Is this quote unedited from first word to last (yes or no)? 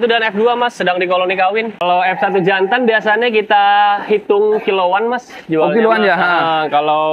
no